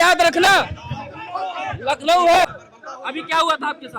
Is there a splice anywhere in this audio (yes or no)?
yes